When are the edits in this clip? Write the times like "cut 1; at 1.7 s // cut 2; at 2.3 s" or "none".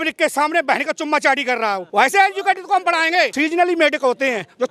cut 1; at 1.8 s // cut 2; at 3.3 s